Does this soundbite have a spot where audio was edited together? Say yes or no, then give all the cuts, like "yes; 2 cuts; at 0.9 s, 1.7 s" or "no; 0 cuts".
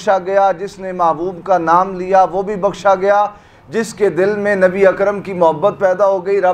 no; 0 cuts